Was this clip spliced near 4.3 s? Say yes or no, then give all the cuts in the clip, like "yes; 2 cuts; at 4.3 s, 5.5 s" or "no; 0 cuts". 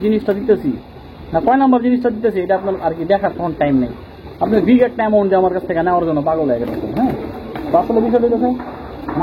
no; 0 cuts